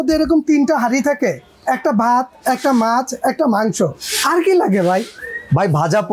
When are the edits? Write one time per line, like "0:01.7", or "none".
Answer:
none